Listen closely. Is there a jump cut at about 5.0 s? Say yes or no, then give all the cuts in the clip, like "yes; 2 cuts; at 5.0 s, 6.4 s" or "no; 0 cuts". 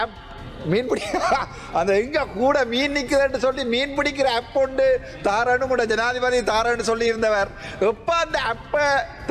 no; 0 cuts